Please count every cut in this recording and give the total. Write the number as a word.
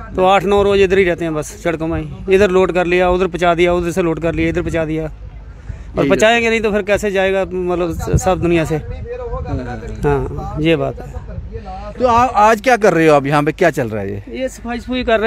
zero